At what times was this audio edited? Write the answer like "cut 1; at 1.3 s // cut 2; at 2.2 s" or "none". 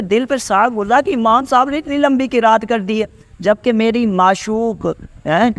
none